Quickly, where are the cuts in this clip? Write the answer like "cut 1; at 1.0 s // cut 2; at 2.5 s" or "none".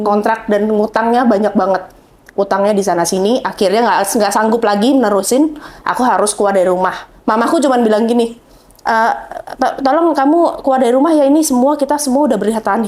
none